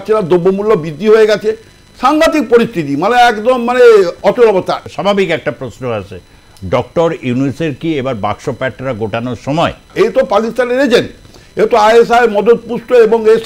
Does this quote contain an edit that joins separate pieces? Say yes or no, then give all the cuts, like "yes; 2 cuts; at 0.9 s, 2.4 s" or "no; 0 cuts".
yes; 2 cuts; at 4.8 s, 9.9 s